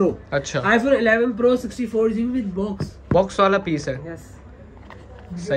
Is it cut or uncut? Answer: uncut